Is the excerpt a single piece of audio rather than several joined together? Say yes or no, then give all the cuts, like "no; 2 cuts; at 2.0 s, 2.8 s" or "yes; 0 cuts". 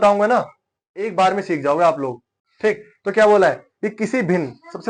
yes; 0 cuts